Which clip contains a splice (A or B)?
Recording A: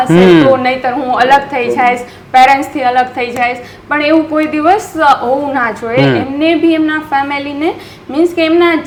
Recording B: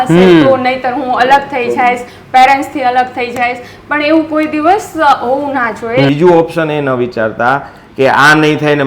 B